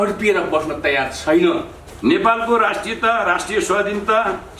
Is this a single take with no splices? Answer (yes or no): no